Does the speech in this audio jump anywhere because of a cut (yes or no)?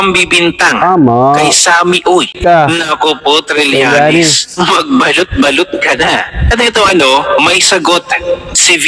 yes